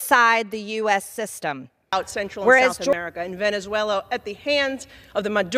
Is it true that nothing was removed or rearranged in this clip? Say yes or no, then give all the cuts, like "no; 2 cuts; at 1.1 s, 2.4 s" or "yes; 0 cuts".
no; 1 cut; at 2.9 s